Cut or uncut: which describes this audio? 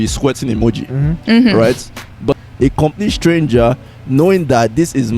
cut